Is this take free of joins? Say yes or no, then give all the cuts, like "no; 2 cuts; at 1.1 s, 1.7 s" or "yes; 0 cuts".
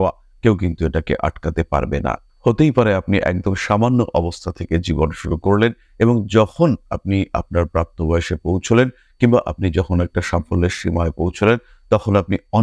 yes; 0 cuts